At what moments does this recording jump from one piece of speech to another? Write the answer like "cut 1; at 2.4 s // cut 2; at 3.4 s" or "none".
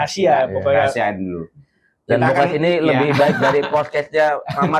none

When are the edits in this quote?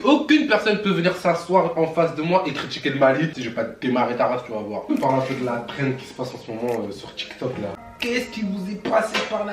cut 1; at 3.4 s // cut 2; at 4.9 s // cut 3; at 7.8 s

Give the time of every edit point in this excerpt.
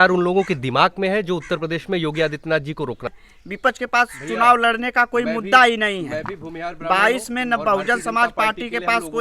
cut 1; at 3.2 s

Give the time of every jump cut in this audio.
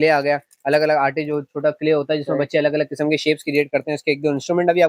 none

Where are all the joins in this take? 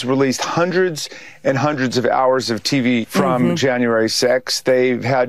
cut 1; at 3.1 s

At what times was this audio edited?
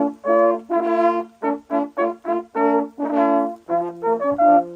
none

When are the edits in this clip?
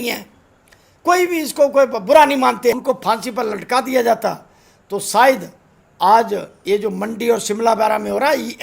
cut 1; at 2.8 s

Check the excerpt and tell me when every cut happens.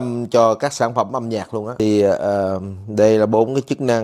none

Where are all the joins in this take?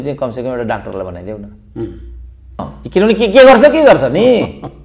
cut 1; at 2.6 s

